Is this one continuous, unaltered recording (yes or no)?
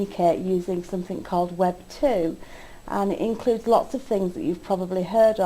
no